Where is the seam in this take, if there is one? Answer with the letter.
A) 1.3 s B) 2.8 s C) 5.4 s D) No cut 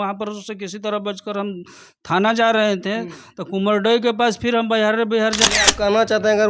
C